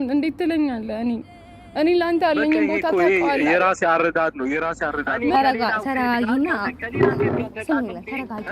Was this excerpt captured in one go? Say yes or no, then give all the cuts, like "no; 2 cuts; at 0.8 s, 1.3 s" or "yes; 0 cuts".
no; 1 cut; at 5.3 s